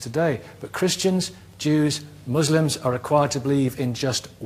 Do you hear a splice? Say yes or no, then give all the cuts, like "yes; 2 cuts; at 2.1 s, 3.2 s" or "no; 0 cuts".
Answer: yes; 1 cut; at 2.7 s